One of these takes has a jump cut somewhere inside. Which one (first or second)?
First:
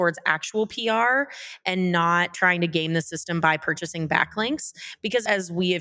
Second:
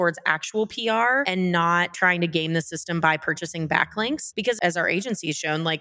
second